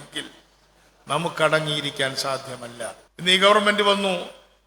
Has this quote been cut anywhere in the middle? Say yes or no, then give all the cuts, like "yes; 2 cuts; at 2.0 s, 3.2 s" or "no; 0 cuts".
yes; 1 cut; at 3.0 s